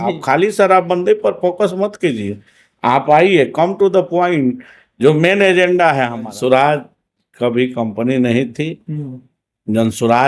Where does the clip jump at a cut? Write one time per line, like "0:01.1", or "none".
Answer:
0:06.3